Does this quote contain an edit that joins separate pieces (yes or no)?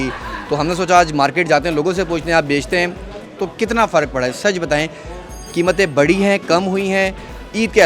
no